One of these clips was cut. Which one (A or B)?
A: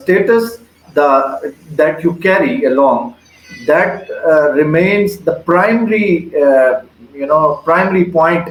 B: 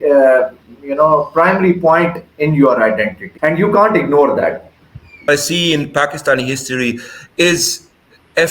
B